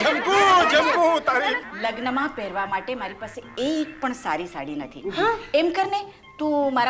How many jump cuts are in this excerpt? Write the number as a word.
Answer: one